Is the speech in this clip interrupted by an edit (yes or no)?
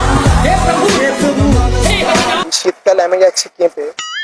yes